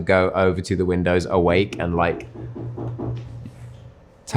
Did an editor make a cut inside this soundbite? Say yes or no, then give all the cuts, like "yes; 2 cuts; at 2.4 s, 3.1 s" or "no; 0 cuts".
no; 0 cuts